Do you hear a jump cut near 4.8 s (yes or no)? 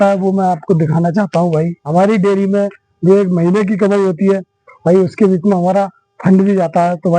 no